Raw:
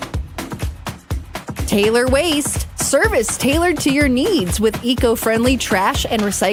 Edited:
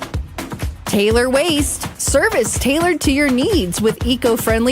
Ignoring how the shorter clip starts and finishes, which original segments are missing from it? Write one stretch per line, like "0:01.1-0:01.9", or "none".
0:00.9-0:01.7